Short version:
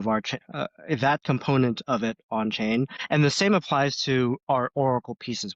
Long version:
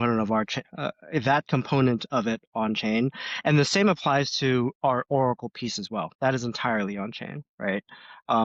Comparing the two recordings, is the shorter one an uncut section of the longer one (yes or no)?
no